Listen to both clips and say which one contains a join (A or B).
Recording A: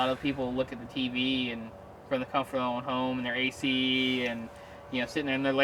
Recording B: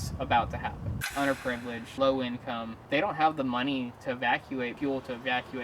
B